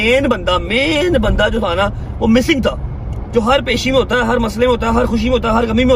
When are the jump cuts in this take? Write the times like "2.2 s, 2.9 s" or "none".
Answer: none